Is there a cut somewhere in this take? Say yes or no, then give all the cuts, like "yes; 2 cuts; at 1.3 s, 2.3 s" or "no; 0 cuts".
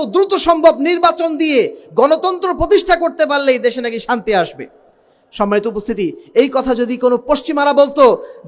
no; 0 cuts